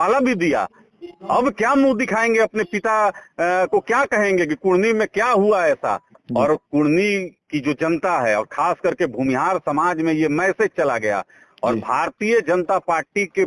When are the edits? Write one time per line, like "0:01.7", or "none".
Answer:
0:06.1